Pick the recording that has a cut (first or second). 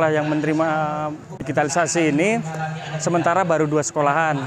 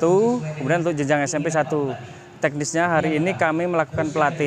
first